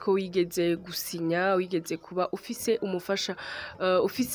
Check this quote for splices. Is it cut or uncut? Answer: uncut